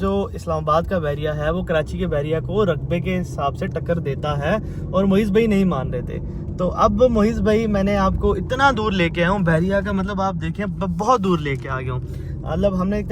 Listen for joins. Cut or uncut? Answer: uncut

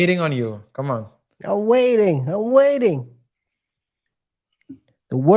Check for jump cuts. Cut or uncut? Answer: uncut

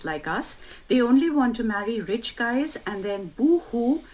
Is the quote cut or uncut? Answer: cut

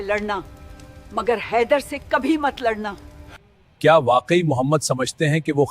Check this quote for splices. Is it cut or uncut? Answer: cut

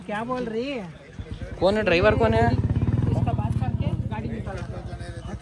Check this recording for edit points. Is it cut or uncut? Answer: uncut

